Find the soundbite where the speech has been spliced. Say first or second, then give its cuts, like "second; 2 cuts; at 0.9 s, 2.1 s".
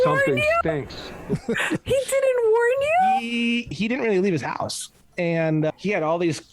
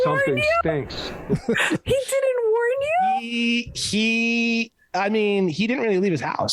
first; 2 cuts; at 3.8 s, 5.7 s